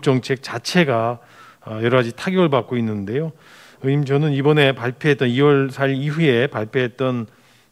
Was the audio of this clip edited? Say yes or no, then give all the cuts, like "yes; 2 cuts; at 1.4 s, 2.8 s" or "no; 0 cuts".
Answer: no; 0 cuts